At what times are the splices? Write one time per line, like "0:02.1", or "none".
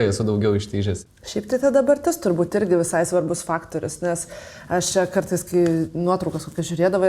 0:01.0